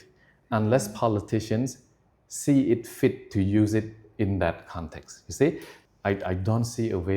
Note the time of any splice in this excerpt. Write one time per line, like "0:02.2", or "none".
0:05.7